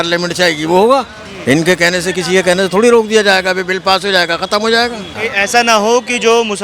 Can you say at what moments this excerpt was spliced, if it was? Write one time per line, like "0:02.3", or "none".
0:05.1